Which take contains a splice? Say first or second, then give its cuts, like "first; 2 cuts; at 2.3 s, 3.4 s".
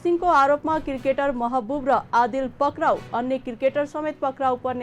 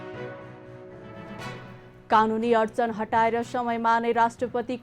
second; 1 cut; at 1.8 s